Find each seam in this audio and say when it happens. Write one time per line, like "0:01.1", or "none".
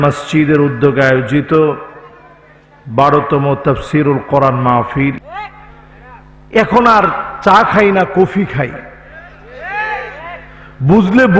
0:05.3